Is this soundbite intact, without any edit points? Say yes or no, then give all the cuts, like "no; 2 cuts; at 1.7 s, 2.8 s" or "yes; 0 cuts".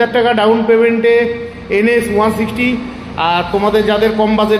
yes; 0 cuts